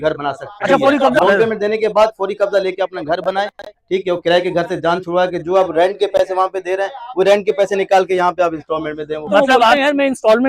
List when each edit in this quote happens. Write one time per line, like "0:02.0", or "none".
0:01.2
0:09.8